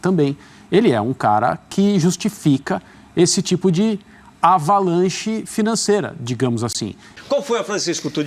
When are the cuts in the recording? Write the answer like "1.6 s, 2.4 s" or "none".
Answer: 7.1 s